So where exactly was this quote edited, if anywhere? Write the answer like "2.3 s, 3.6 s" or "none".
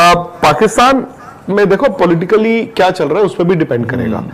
none